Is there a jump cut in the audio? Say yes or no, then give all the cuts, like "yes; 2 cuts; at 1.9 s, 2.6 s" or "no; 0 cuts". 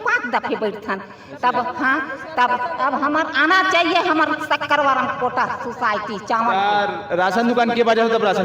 no; 0 cuts